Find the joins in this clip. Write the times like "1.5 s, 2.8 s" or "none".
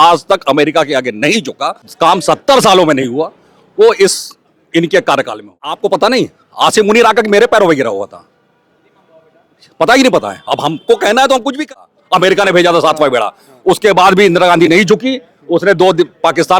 1.9 s, 5.8 s, 11.6 s